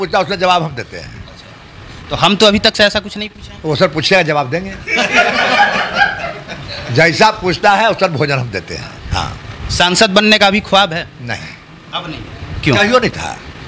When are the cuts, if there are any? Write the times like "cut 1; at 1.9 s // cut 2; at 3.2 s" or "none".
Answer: none